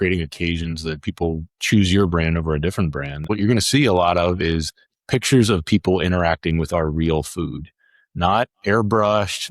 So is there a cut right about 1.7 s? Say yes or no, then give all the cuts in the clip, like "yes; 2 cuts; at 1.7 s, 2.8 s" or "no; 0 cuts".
no; 1 cut; at 3.2 s